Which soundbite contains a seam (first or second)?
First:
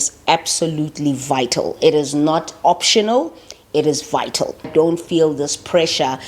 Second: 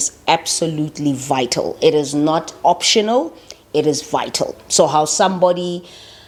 first